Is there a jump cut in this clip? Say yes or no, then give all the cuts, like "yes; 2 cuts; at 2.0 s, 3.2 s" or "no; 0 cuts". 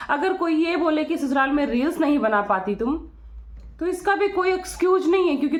no; 0 cuts